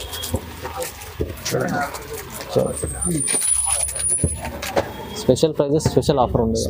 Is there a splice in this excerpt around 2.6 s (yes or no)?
no